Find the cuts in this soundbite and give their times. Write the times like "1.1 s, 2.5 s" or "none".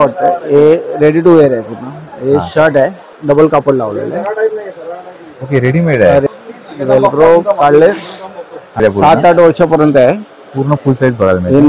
3.1 s, 6.2 s, 8.8 s